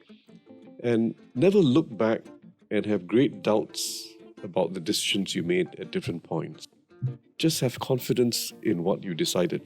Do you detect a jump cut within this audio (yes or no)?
yes